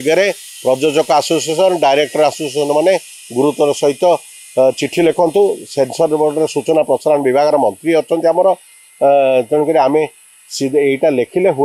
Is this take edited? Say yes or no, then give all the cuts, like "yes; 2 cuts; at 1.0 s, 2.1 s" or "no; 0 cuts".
no; 0 cuts